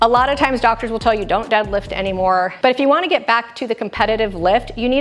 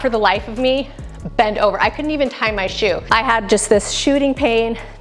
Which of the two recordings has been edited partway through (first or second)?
first